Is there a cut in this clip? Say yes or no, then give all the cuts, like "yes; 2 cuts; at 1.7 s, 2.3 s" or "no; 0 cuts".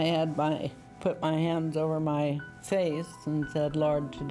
no; 0 cuts